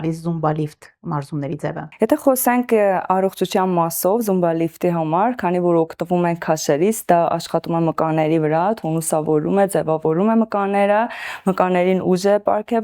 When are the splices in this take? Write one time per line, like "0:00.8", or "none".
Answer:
none